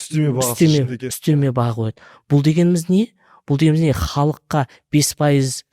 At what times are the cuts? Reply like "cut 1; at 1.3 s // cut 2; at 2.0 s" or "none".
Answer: none